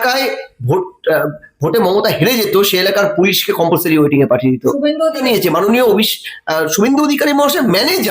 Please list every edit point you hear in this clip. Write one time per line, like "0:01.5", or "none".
0:05.2

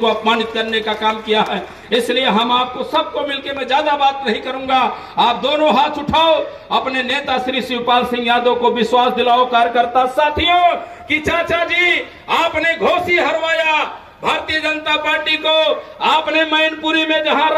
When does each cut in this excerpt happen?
none

